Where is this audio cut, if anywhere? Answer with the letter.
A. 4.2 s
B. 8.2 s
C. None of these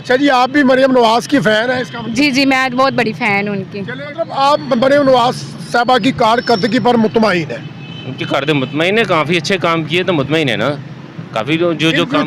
A